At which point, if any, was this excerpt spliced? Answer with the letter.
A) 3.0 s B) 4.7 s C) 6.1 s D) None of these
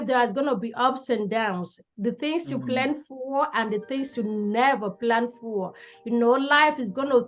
D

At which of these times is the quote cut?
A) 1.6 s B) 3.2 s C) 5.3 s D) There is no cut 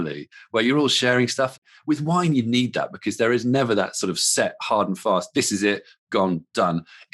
A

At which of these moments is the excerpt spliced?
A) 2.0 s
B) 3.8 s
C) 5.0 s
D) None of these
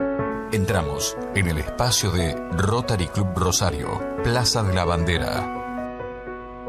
D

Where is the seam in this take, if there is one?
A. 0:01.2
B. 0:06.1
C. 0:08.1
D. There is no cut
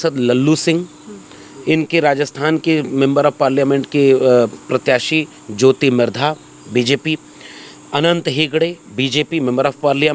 D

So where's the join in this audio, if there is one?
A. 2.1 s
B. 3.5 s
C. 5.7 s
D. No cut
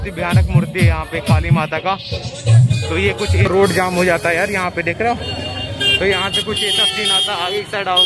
B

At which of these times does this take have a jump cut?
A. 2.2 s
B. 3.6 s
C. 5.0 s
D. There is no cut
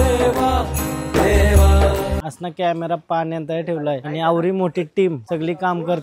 A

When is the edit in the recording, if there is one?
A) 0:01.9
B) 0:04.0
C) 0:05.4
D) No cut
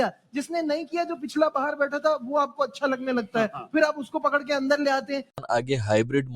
C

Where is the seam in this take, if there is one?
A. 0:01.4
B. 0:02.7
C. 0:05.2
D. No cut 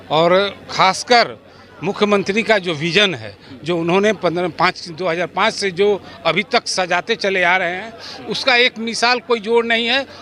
D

